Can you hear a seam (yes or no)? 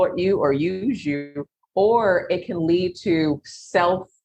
no